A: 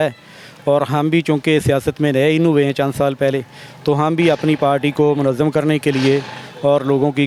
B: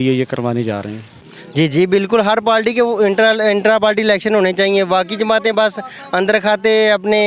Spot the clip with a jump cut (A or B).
B